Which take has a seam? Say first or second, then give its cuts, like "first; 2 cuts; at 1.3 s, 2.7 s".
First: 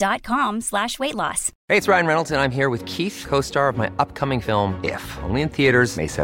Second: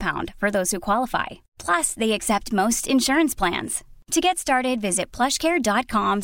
first; 1 cut; at 1.5 s